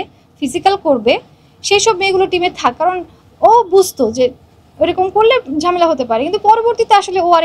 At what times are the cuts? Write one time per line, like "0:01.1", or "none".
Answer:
none

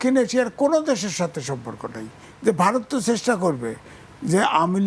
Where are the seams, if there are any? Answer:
0:02.2

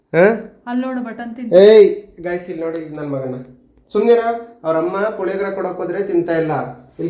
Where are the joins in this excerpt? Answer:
none

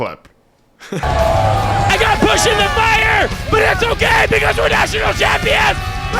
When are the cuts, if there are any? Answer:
0:01.0

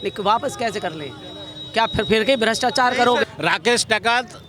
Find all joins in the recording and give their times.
0:03.2

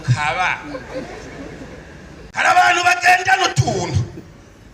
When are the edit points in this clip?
0:02.2

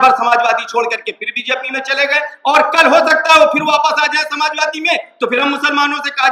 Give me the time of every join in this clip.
none

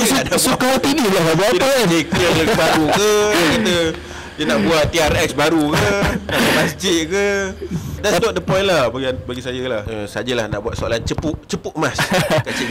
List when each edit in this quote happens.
0:08.0
0:09.8

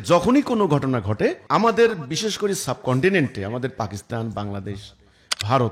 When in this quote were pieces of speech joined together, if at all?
0:01.4

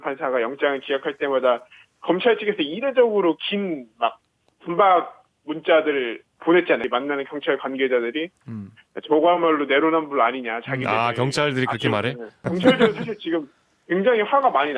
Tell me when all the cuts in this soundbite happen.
0:06.8
0:12.4

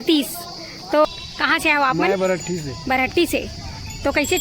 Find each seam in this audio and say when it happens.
0:01.0

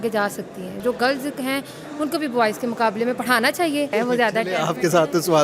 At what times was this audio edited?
0:00.8
0:03.9

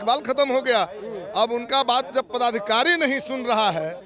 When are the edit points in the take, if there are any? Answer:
none

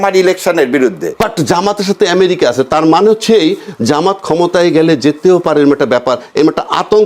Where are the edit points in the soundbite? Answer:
0:01.2

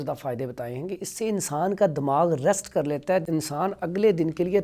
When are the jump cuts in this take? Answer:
0:03.3

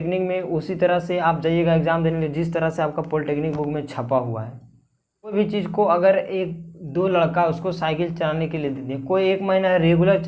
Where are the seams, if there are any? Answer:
0:05.3

